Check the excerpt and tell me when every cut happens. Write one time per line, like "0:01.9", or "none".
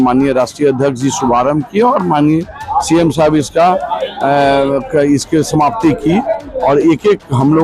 none